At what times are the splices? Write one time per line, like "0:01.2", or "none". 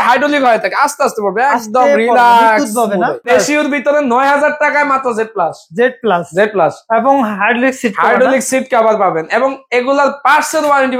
0:03.3